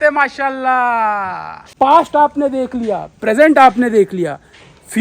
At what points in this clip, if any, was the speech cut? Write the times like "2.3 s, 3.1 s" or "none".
1.7 s

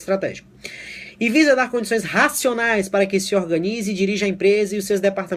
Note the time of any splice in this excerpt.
3.6 s

